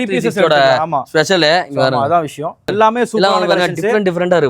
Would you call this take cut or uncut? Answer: cut